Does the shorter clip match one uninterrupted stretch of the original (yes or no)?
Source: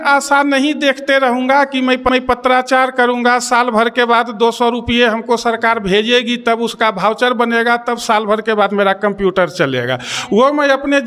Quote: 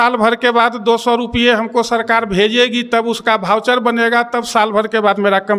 yes